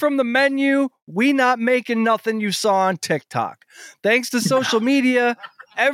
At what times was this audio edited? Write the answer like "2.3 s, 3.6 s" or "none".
none